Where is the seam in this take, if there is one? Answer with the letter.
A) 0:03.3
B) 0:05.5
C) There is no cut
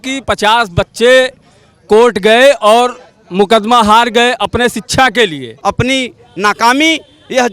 B